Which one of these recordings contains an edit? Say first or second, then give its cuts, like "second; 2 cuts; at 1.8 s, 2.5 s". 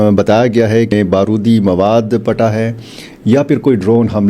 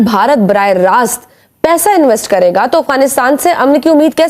first; 1 cut; at 0.9 s